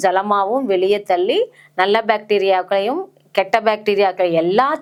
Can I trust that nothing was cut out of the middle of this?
yes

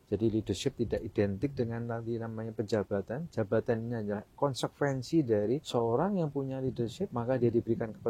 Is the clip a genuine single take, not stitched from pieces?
no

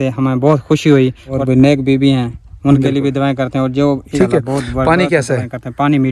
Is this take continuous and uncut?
no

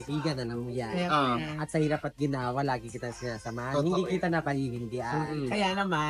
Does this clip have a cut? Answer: no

